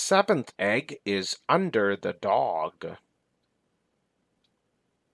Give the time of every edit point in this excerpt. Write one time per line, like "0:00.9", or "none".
none